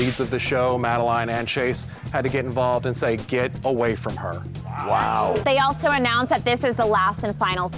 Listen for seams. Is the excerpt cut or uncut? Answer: cut